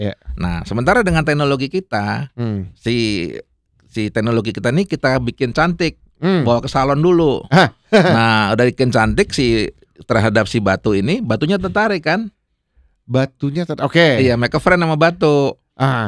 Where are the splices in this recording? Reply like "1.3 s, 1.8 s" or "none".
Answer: none